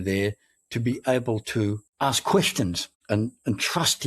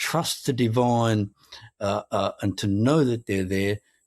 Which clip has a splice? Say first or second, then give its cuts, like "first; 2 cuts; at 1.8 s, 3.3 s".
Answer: first; 2 cuts; at 1.9 s, 2.9 s